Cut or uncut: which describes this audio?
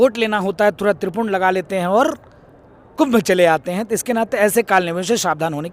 uncut